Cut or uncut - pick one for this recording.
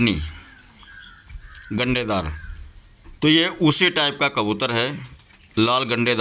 uncut